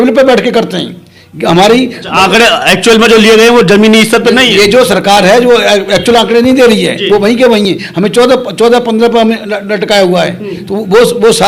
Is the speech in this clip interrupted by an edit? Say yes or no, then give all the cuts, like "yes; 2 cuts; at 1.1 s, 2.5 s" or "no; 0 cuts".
no; 0 cuts